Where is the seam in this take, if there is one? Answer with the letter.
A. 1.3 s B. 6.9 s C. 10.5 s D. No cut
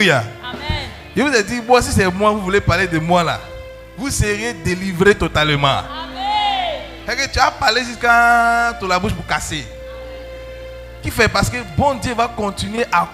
D